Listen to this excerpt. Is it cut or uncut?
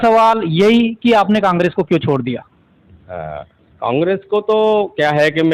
uncut